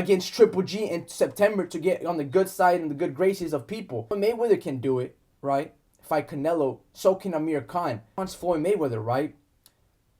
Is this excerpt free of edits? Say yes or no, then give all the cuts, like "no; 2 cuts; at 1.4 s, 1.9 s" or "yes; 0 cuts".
no; 2 cuts; at 4.1 s, 8.2 s